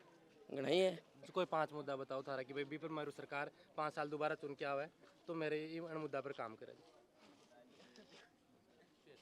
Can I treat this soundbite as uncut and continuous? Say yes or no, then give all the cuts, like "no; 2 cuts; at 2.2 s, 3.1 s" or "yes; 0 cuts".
yes; 0 cuts